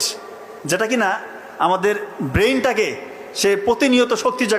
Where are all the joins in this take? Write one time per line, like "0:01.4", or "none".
none